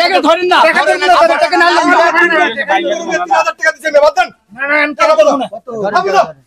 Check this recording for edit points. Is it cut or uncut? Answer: uncut